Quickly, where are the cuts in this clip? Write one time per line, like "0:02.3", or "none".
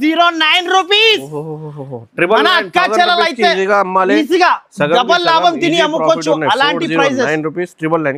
none